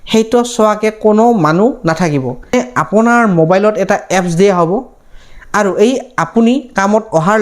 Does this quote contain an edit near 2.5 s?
yes; 1 cut; at 2.5 s

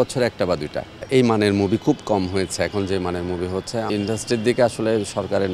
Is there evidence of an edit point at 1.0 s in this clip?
yes; 2 cuts; at 1.0 s, 3.9 s

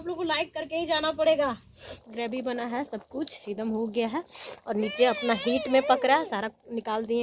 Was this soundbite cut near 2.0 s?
yes; 1 cut; at 2.0 s

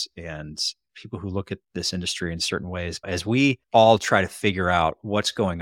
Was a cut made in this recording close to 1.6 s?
no; 1 cut; at 3.6 s

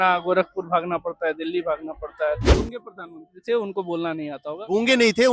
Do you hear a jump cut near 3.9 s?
no; 1 cut; at 2.5 s

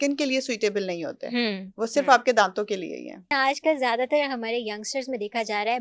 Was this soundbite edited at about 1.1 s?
no; 1 cut; at 3.3 s

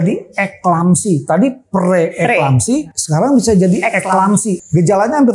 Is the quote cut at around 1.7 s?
no; 2 cuts; at 3.0 s, 4.5 s

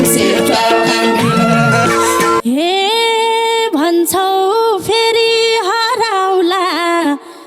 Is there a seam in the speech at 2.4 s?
yes; 1 cut; at 2.4 s

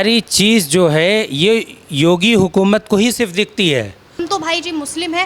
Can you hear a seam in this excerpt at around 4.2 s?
yes; 1 cut; at 4.2 s

